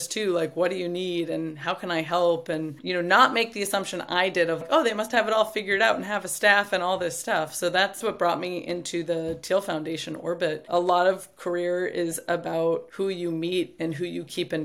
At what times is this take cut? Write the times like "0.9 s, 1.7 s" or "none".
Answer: 4.6 s, 10.7 s, 12.9 s